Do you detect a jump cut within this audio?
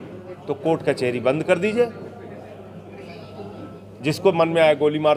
no; 0 cuts

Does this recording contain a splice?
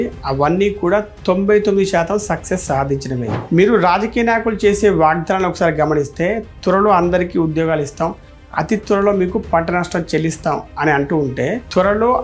yes; 1 cut; at 3.4 s

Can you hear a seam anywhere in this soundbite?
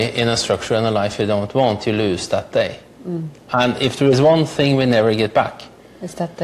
no; 0 cuts

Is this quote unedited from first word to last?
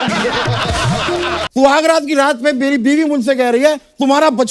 no; 1 cut; at 1.4 s

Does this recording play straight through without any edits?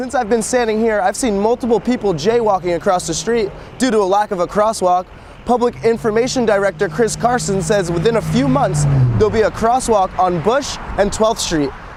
yes; 0 cuts

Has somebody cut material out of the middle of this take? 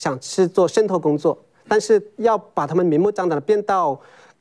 no; 0 cuts

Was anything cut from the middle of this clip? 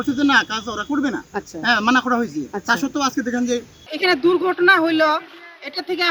yes; 1 cut; at 3.8 s

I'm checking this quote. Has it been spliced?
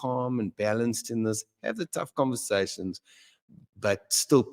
no; 0 cuts

